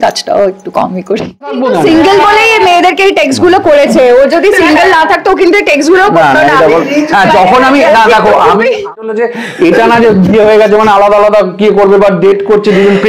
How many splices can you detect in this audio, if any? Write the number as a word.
two